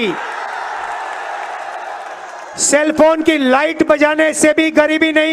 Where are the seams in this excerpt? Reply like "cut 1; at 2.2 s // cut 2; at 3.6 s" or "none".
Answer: none